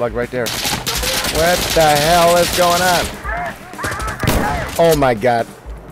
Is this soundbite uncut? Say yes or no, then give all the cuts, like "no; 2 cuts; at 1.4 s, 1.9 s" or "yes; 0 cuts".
no; 1 cut; at 4.6 s